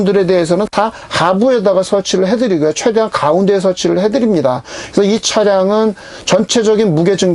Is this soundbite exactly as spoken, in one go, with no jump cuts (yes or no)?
yes